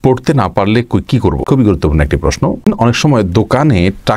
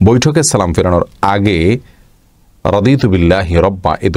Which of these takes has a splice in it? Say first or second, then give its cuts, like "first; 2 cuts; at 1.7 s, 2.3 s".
first; 2 cuts; at 1.4 s, 2.6 s